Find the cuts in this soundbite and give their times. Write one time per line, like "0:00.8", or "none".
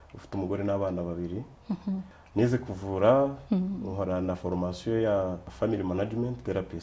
0:02.2
0:05.5